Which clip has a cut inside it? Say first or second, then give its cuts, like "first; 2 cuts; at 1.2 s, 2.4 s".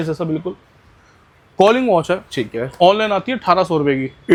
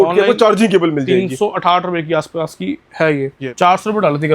second; 1 cut; at 3.4 s